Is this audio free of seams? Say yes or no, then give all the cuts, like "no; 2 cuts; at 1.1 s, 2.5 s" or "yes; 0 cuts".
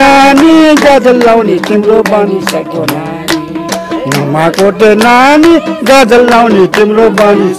yes; 0 cuts